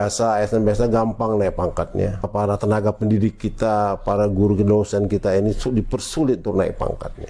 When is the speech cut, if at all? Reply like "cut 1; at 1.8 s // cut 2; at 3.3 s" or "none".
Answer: cut 1; at 2.3 s